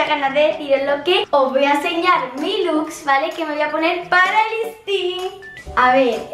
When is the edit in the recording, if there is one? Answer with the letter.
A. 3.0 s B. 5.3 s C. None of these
B